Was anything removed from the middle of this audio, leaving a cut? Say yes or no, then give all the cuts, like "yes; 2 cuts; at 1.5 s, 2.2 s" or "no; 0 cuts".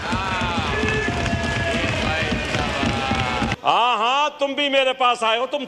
yes; 1 cut; at 3.6 s